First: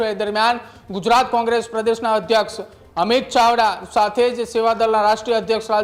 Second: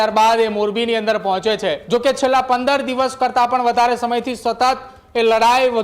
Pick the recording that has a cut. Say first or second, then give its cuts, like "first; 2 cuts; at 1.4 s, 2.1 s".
second; 1 cut; at 1.8 s